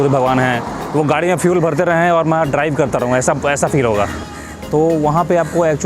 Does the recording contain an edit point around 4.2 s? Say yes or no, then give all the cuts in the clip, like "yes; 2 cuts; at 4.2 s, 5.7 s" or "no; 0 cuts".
yes; 1 cut; at 4.2 s